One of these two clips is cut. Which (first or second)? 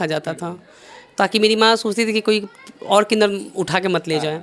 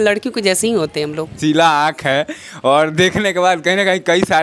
second